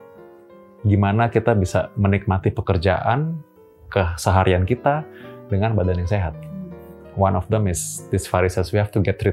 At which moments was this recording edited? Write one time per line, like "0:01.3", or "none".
none